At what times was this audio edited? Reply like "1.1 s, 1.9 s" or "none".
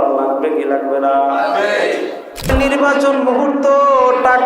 2.5 s